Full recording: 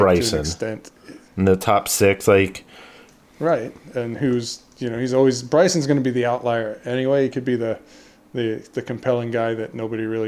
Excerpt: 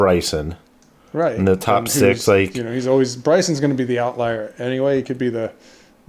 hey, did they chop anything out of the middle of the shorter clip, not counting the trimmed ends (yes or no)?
yes